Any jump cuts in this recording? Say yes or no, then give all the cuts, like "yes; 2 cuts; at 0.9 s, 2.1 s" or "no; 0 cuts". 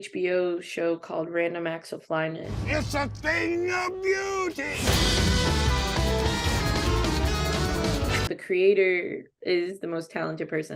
yes; 1 cut; at 9.3 s